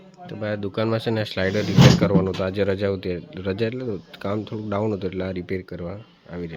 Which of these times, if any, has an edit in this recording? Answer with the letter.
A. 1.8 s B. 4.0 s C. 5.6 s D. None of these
D